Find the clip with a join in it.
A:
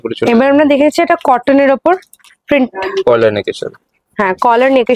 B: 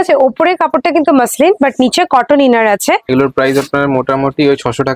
B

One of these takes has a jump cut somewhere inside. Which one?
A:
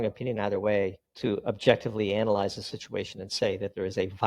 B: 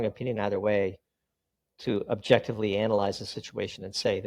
A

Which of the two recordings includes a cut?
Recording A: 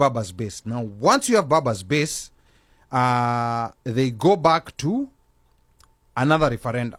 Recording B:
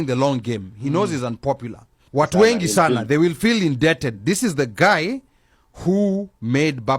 B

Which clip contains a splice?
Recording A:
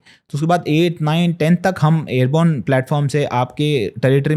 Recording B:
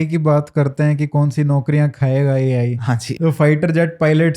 B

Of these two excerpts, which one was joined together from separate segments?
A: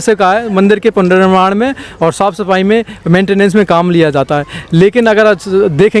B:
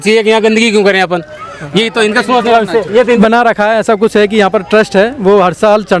B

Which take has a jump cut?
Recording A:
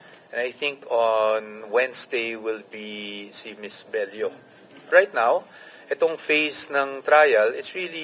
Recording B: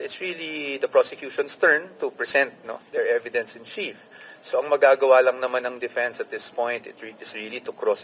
A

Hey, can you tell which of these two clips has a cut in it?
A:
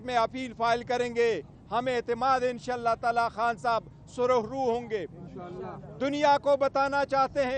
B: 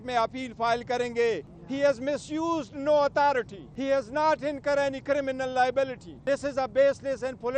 B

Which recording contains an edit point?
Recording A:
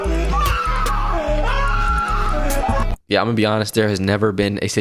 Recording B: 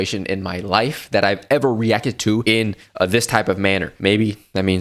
B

